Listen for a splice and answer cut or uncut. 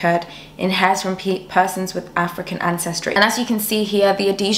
cut